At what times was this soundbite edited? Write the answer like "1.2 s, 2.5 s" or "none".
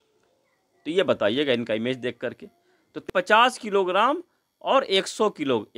3.1 s